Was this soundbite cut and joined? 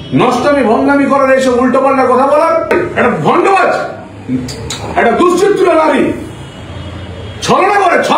yes; 1 cut; at 2.7 s

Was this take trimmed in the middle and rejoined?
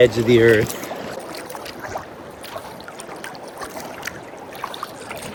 no; 0 cuts

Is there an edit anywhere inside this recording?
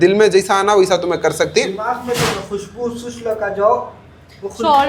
no; 0 cuts

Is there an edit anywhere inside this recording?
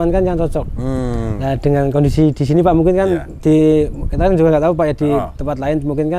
no; 0 cuts

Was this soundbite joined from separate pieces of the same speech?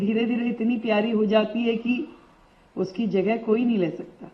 no; 0 cuts

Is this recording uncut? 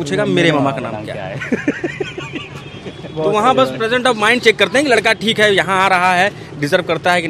yes; 0 cuts

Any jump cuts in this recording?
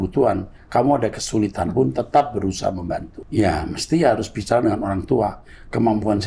yes; 1 cut; at 3.2 s

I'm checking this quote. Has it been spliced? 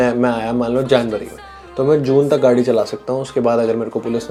no; 0 cuts

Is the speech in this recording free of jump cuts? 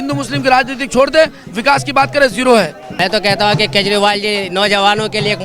no; 1 cut; at 2.8 s

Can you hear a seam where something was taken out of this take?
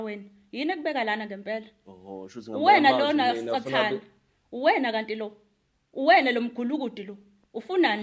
no; 0 cuts

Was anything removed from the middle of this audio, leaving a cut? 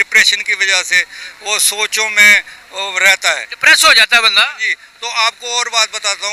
no; 0 cuts

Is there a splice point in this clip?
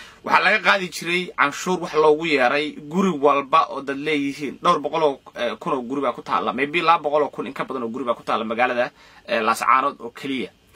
no; 0 cuts

